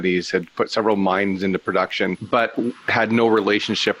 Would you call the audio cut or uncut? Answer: cut